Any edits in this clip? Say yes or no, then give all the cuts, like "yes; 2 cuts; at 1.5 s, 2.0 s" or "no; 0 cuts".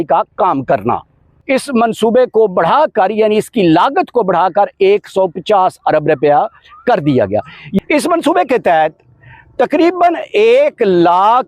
yes; 2 cuts; at 1.3 s, 7.8 s